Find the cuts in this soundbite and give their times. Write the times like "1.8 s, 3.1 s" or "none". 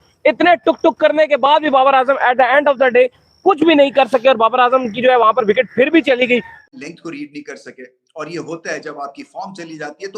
6.6 s